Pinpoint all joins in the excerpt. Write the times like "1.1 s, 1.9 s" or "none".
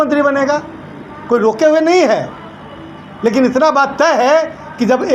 none